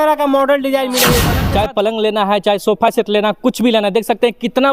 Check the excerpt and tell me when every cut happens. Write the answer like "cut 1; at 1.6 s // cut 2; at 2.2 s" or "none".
cut 1; at 1.3 s